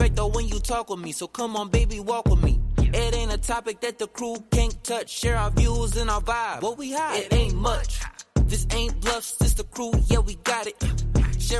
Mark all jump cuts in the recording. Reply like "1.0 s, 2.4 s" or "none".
none